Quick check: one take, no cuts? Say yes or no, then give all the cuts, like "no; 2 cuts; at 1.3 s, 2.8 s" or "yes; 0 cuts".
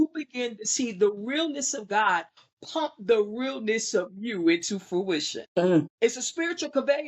no; 2 cuts; at 5.4 s, 5.9 s